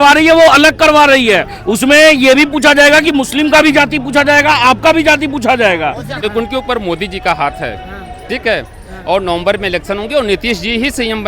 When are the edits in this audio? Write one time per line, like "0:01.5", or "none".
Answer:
0:06.2